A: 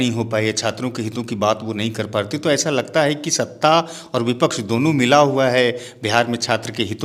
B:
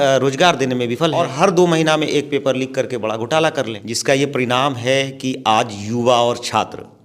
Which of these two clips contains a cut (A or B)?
B